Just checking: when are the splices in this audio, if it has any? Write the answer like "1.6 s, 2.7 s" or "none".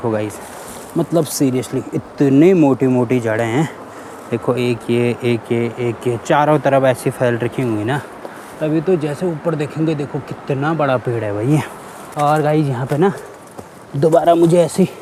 none